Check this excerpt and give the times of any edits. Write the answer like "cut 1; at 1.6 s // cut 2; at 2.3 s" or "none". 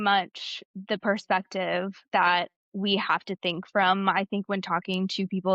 none